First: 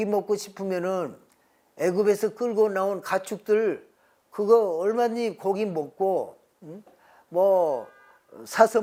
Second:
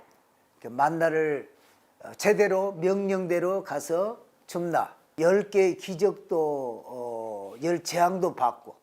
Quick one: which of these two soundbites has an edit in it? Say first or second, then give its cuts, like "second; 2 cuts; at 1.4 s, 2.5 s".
second; 1 cut; at 5.1 s